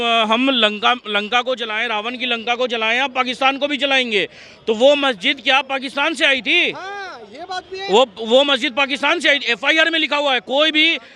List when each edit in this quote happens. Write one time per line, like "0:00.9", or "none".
none